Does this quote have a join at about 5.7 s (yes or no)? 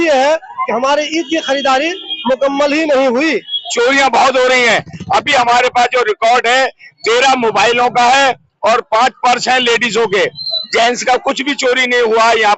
no